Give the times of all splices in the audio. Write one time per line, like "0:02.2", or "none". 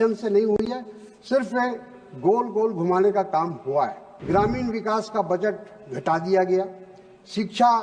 0:04.1